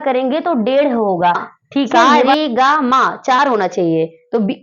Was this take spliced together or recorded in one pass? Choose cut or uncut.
cut